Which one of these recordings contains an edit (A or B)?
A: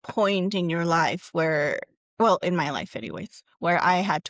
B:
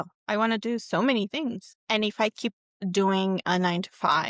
B